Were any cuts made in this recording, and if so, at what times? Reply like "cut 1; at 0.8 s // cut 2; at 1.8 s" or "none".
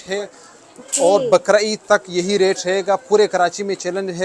none

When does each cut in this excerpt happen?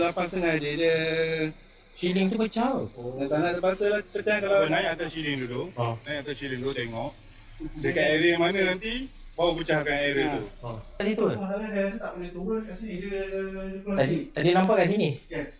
cut 1; at 11.0 s

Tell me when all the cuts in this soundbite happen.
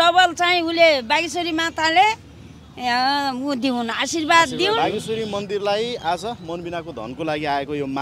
cut 1; at 4.8 s

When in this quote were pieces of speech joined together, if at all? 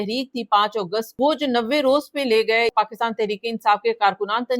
cut 1; at 1.1 s // cut 2; at 2.7 s

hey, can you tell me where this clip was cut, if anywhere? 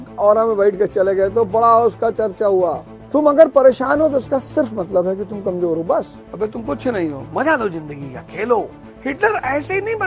cut 1; at 2.9 s // cut 2; at 6.2 s // cut 3; at 8.8 s

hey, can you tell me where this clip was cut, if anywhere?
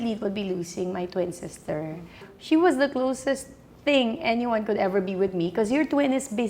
cut 1; at 2.3 s

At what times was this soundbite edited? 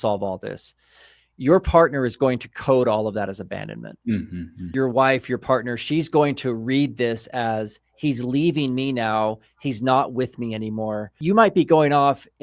cut 1; at 4.7 s // cut 2; at 11.2 s

